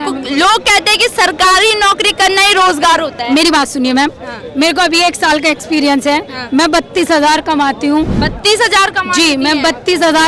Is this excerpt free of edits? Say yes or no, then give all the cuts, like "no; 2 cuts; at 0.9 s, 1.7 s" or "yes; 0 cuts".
yes; 0 cuts